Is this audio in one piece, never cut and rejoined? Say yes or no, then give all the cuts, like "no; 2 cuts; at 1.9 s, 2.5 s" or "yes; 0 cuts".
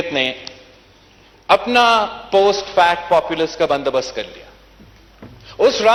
yes; 0 cuts